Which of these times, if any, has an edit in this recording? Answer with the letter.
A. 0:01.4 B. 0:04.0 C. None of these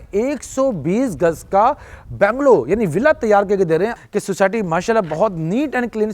B